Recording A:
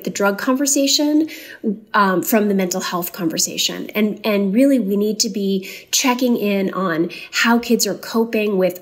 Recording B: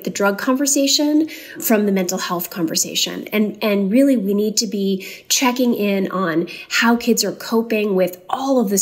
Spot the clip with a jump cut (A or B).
B